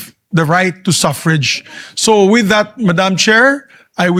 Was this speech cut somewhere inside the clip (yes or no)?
no